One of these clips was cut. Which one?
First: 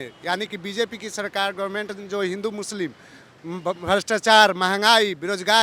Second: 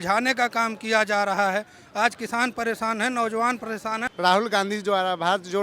second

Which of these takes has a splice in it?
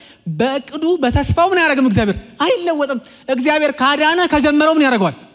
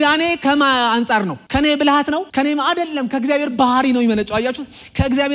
second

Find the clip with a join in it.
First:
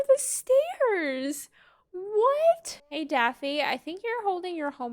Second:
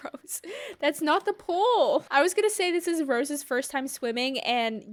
first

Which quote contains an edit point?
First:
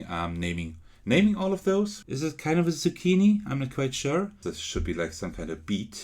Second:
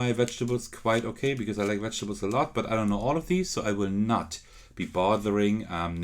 first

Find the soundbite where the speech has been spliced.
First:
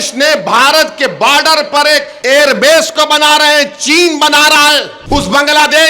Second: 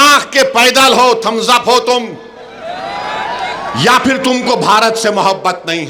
first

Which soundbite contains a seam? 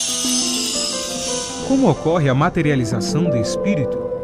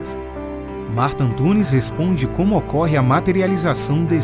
first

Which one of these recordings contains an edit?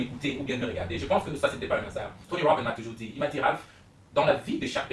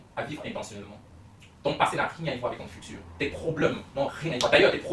first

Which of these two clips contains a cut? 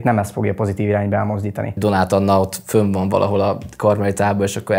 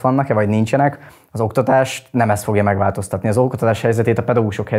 first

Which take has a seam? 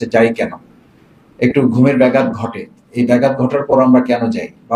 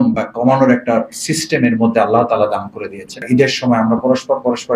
second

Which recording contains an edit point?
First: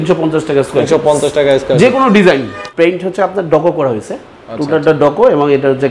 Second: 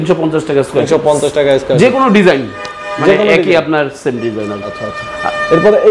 first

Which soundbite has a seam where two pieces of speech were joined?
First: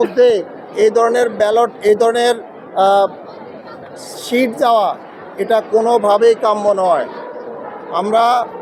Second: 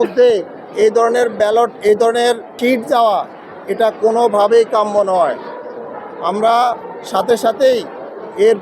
second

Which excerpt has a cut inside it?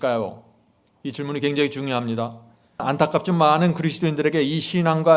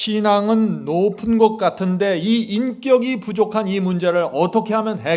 first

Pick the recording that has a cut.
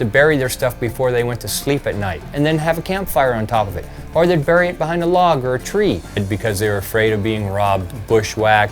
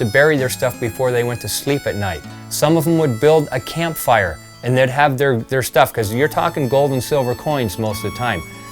first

